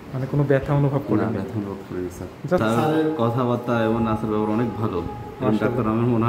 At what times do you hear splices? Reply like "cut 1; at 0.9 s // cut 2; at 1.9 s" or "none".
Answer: cut 1; at 2.2 s